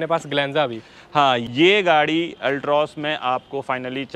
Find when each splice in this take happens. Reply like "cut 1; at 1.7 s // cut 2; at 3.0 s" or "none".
cut 1; at 1.4 s